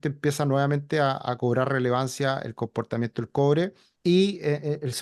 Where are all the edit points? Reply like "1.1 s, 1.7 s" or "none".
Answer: 3.9 s